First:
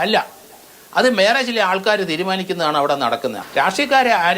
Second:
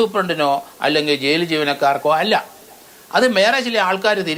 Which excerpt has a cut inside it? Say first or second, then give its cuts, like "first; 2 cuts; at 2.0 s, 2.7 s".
first; 1 cut; at 3.4 s